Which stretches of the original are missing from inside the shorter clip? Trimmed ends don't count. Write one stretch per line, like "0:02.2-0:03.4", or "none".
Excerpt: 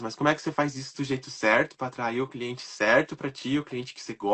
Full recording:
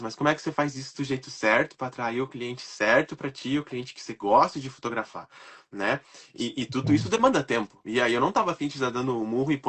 none